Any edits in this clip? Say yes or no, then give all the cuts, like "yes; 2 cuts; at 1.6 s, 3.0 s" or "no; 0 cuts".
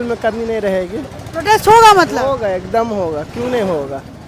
no; 0 cuts